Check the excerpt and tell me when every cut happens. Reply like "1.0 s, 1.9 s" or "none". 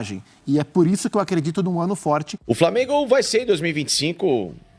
2.3 s